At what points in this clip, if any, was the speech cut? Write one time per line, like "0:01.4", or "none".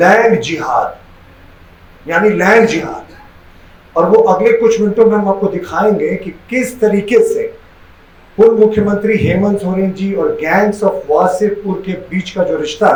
none

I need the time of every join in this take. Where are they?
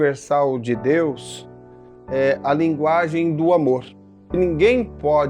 0:04.3

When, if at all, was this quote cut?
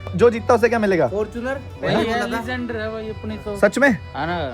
none

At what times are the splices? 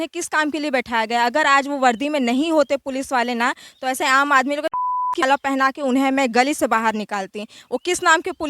0:05.1

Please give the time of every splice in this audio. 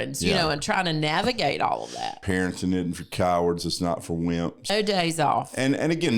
0:02.2
0:04.7

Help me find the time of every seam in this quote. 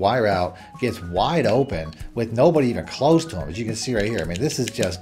none

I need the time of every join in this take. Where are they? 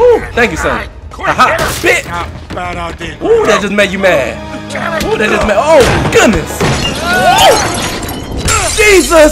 none

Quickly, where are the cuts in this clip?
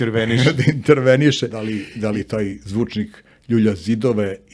0:01.5

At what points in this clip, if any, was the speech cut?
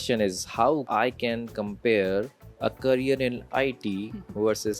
0:00.8
0:02.4

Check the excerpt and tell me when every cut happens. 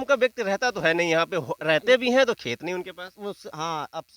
none

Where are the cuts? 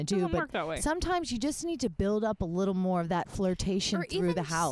none

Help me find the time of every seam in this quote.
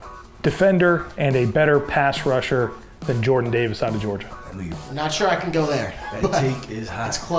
0:04.8

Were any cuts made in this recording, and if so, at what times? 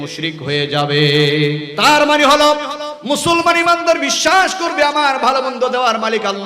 0:01.7

